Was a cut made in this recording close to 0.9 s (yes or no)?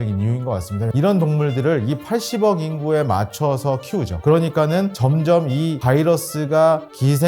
yes